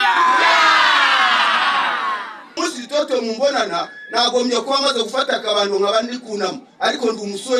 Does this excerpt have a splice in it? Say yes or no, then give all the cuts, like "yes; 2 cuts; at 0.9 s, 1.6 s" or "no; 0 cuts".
yes; 1 cut; at 2.6 s